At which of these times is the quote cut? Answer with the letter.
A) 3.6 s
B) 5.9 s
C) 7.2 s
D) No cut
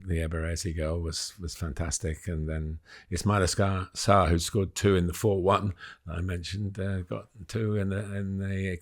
D